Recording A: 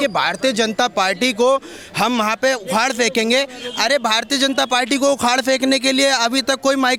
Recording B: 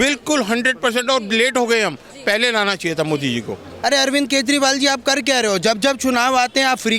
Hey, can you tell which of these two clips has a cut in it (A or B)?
B